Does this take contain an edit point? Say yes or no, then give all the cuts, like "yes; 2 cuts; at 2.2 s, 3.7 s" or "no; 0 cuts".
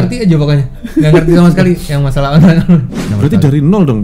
yes; 1 cut; at 3.0 s